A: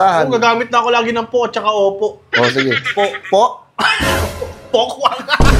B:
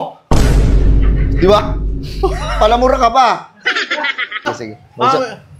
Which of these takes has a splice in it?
B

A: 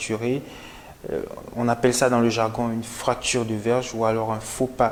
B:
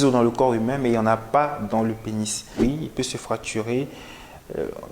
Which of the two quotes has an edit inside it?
B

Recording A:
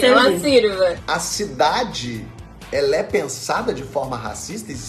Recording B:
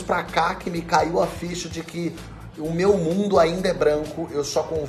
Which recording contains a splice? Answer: A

